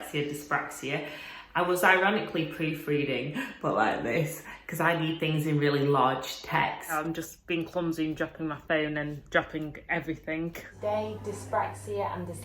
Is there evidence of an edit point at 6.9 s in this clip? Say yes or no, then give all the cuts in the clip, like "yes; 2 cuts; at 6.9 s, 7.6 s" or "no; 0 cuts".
yes; 2 cuts; at 6.9 s, 10.6 s